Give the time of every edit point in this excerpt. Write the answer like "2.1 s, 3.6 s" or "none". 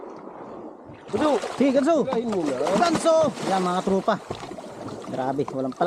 none